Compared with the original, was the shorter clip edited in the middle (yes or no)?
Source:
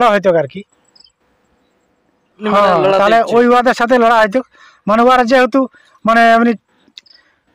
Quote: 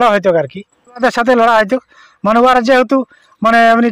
yes